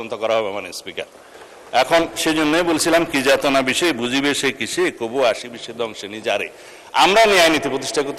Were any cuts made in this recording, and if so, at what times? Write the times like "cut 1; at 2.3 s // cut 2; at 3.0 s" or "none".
none